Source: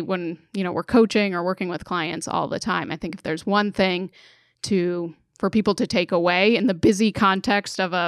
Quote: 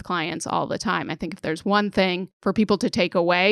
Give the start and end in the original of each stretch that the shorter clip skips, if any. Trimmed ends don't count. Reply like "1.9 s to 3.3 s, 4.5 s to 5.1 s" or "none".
3.8 s to 4.9 s